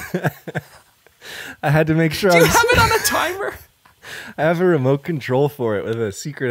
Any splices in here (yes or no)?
no